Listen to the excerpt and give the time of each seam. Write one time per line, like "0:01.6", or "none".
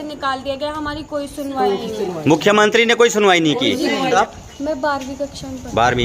0:04.2